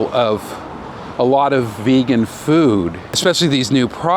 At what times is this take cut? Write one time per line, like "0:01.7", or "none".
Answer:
0:03.2